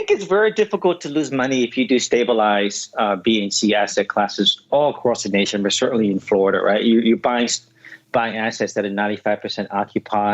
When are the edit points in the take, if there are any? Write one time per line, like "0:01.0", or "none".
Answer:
none